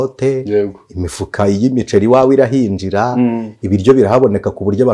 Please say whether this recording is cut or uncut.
uncut